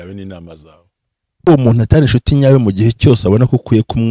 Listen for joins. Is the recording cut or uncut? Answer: cut